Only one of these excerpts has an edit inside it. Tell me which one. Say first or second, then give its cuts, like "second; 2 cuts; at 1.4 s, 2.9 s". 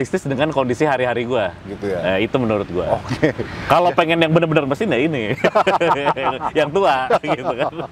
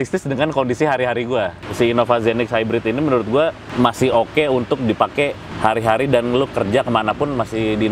second; 3 cuts; at 1.6 s, 3.6 s, 5.4 s